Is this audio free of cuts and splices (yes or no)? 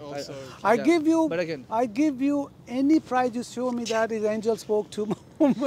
yes